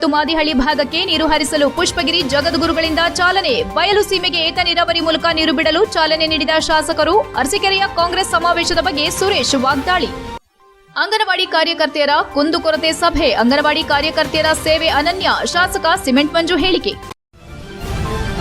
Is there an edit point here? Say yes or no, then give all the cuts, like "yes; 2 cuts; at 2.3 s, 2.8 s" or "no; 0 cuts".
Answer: yes; 1 cut; at 17.0 s